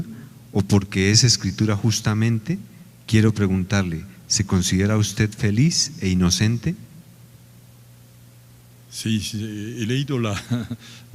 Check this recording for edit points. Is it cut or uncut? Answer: cut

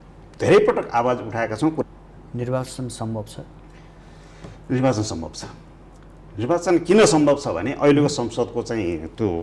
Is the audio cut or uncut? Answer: cut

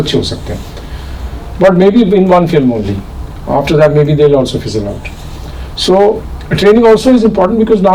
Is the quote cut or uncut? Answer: uncut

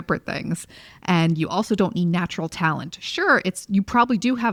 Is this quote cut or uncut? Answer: uncut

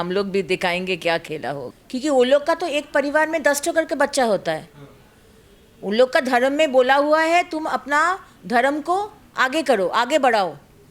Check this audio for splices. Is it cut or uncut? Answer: cut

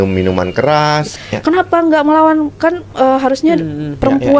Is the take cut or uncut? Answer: cut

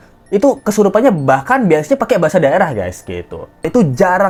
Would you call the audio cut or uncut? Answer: uncut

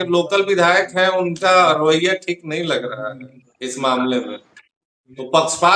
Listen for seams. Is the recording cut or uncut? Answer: uncut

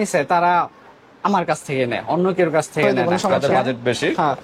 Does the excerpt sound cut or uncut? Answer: cut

